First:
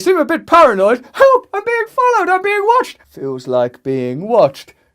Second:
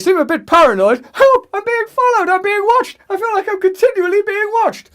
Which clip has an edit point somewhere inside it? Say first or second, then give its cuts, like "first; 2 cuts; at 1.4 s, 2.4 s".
first; 1 cut; at 3.0 s